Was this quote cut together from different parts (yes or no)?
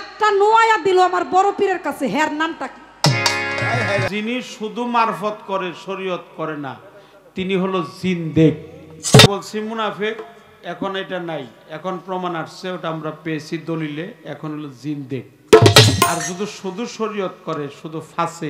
yes